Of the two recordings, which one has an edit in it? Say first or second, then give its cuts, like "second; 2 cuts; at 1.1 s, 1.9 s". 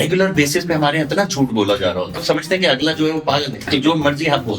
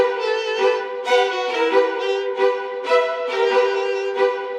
first; 2 cuts; at 2.2 s, 3.7 s